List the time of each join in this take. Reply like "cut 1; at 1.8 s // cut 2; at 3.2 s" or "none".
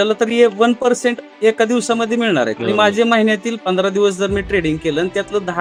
none